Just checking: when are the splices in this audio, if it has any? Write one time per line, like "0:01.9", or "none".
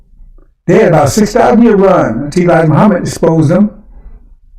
0:02.9